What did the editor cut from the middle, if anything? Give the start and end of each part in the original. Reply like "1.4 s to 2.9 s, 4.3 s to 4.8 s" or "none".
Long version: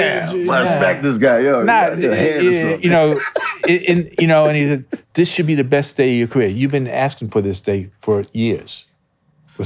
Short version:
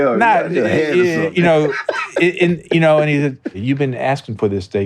5.1 s to 6.5 s